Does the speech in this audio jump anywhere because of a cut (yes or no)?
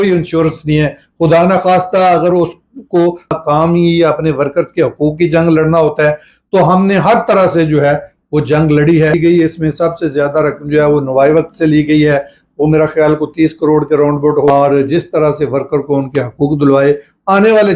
yes